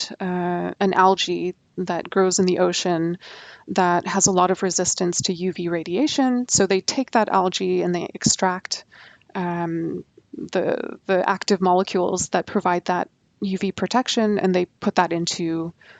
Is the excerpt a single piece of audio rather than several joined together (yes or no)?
yes